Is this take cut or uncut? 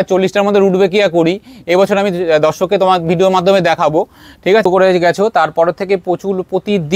cut